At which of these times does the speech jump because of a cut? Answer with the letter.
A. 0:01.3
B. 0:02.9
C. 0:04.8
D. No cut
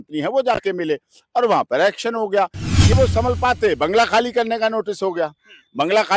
B